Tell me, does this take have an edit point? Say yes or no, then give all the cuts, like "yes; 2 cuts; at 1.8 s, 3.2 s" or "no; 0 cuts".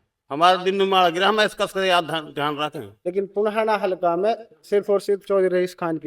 yes; 1 cut; at 2.9 s